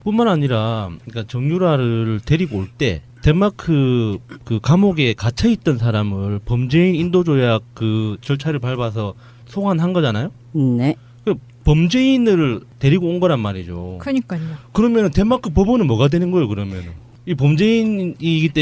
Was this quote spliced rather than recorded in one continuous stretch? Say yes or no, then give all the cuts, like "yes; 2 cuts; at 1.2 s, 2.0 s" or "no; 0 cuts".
no; 0 cuts